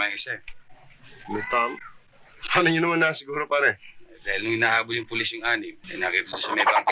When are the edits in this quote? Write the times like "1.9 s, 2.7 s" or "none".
5.8 s